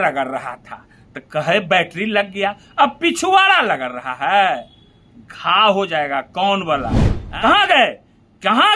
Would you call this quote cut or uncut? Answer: cut